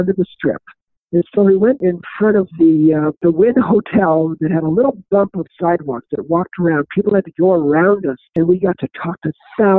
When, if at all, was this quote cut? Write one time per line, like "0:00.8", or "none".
0:01.8
0:03.2
0:08.2